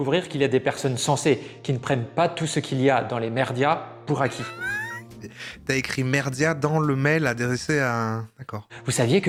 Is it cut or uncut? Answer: uncut